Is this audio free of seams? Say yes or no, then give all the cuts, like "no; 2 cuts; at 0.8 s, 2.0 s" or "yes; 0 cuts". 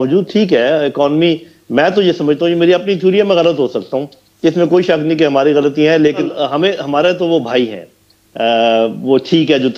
no; 1 cut; at 6.3 s